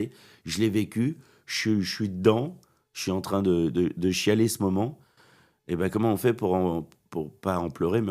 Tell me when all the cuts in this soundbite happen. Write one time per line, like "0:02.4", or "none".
none